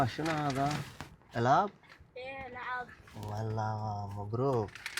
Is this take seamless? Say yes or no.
yes